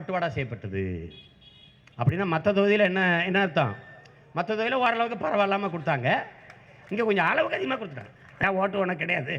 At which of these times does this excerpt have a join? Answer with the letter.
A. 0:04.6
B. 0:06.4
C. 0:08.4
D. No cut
C